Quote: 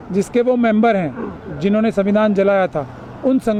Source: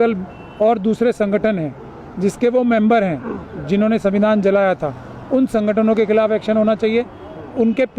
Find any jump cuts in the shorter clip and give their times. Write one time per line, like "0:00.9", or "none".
none